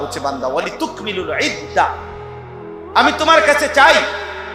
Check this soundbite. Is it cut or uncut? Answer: uncut